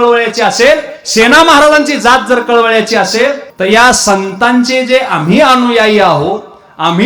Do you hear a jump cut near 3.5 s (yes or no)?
yes